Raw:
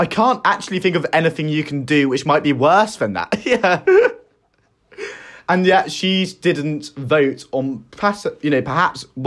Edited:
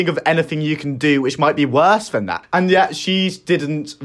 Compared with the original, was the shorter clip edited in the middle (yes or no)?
yes